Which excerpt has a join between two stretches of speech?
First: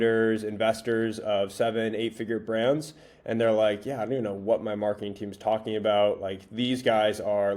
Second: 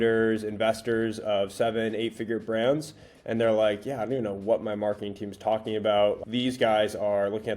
second; 1 cut; at 6.2 s

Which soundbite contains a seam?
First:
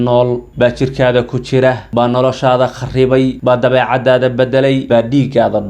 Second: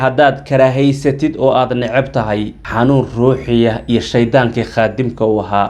first; 3 cuts; at 1.8 s, 3.4 s, 4.8 s

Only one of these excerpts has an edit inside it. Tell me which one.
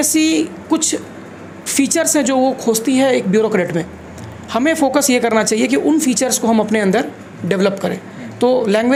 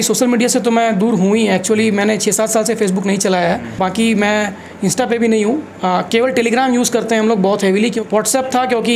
second; 2 cuts; at 3.8 s, 8.0 s

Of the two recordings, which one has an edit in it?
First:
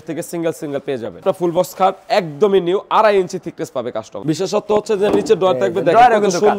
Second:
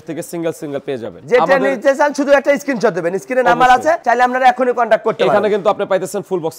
first; 2 cuts; at 1.2 s, 4.1 s

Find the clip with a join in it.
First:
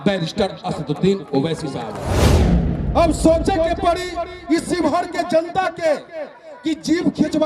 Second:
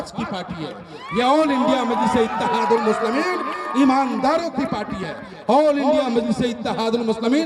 first; 1 cut; at 2.2 s

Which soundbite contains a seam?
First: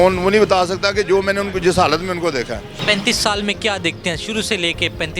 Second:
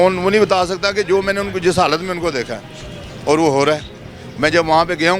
first; 1 cut; at 2.7 s

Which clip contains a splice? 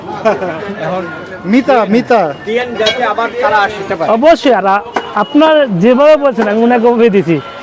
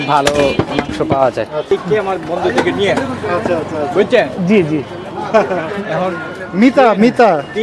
second; 1 cut; at 1.7 s

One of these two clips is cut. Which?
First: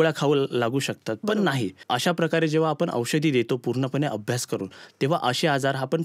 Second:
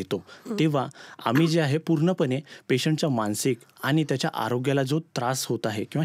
first; 1 cut; at 1.8 s

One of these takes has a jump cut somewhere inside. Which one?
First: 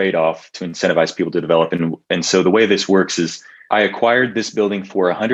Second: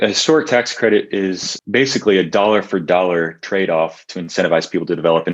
second; 1 cut; at 1.5 s

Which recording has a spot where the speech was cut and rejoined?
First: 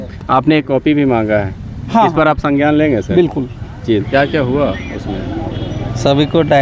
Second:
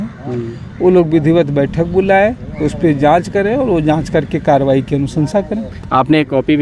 first; 1 cut; at 4.0 s

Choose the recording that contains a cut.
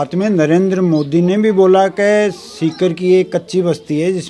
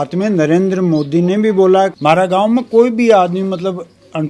second; 1 cut; at 1.9 s

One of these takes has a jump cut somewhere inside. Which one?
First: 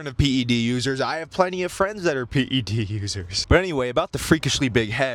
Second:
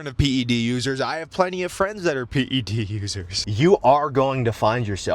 second; 1 cut; at 3.4 s

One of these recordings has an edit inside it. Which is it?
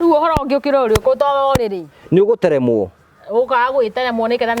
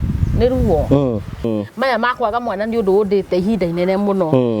second; 1 cut; at 1.4 s

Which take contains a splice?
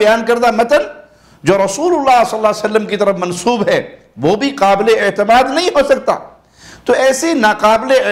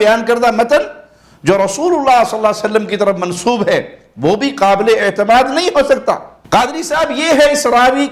second; 1 cut; at 6.3 s

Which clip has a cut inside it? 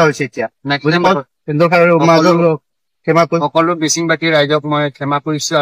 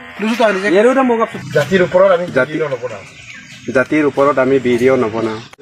first; 1 cut; at 1.0 s

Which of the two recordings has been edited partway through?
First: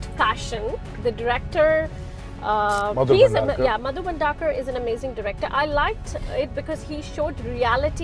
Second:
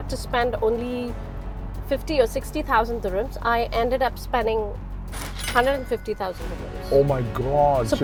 first; 1 cut; at 0.9 s

